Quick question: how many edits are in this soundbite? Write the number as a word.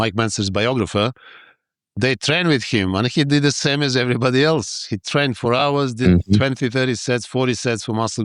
zero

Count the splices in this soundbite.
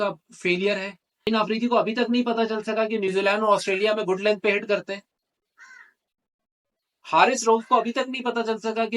one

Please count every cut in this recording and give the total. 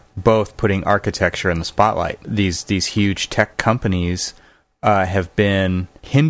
zero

